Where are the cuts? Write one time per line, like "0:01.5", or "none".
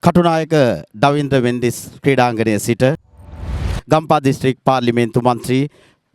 0:03.3